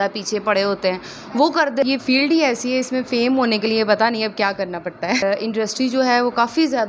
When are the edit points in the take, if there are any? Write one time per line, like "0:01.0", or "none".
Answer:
0:01.8
0:05.2